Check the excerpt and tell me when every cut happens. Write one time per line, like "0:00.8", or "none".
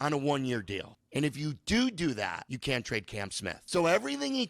0:00.9
0:02.5
0:03.6